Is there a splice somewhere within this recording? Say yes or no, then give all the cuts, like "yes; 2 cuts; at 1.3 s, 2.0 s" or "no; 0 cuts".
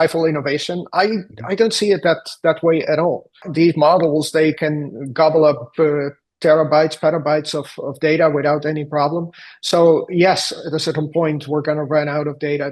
yes; 1 cut; at 3.5 s